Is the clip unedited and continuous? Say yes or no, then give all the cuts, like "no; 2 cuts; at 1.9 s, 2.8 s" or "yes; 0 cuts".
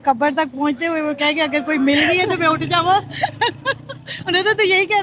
yes; 0 cuts